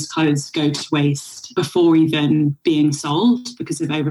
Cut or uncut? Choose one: cut